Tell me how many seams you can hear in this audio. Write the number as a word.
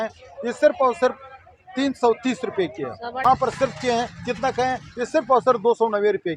one